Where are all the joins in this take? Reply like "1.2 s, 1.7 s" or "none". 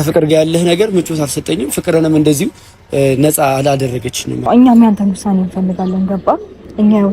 4.4 s